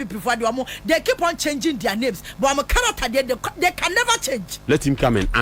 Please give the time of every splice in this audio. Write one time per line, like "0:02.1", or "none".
0:04.5